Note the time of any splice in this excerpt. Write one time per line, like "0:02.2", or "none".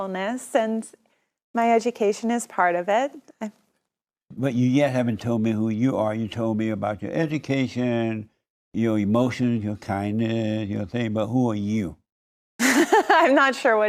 none